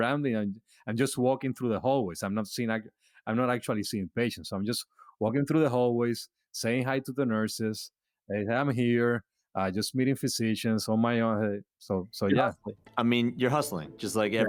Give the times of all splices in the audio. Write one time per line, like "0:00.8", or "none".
none